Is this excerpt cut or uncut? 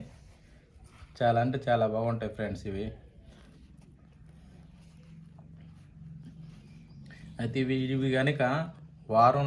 uncut